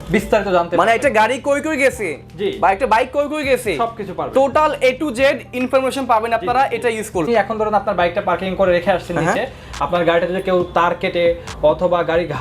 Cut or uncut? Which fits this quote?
cut